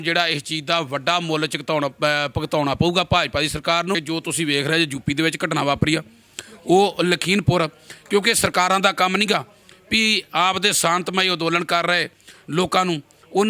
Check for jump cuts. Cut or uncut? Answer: cut